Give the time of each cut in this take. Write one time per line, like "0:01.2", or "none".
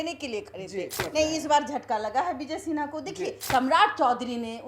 0:01.1
0:03.4